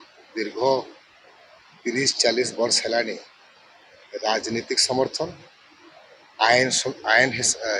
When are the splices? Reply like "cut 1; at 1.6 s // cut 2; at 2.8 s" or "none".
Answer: none